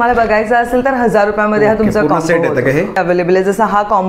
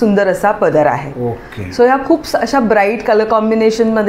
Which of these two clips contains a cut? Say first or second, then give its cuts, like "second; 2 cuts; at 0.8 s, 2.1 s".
first; 1 cut; at 3.0 s